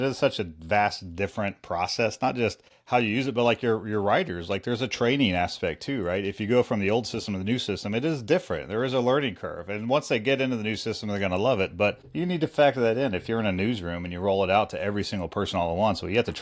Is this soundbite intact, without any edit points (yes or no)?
no